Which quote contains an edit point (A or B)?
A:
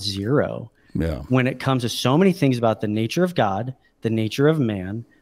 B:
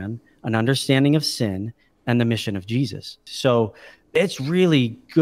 B